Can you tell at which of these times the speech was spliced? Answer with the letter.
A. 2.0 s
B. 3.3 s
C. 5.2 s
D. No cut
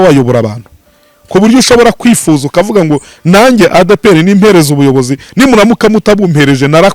D